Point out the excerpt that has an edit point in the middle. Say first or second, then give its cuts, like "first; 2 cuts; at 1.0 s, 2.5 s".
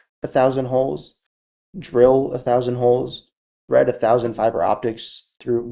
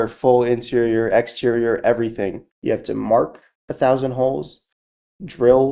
second; 1 cut; at 2.4 s